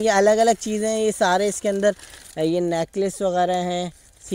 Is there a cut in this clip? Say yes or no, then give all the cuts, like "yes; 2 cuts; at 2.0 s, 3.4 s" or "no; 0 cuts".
no; 0 cuts